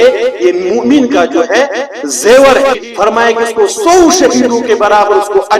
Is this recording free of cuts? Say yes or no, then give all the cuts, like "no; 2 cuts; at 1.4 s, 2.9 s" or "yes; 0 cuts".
no; 1 cut; at 2.8 s